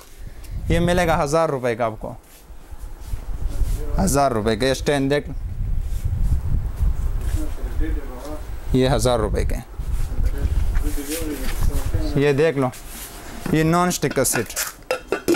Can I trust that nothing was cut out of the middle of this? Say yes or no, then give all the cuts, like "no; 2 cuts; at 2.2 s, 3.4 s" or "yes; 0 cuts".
yes; 0 cuts